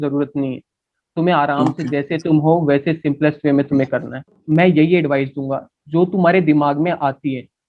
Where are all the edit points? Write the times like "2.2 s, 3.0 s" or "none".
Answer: 4.4 s